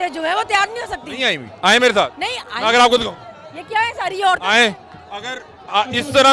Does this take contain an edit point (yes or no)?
no